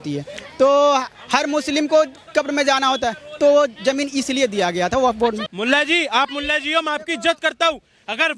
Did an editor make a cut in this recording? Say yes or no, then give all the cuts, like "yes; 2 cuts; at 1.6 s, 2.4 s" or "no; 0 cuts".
yes; 1 cut; at 5.5 s